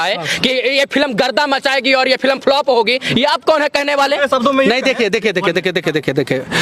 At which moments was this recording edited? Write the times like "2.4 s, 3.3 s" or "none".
none